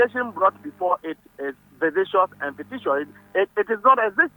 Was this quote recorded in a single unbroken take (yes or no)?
yes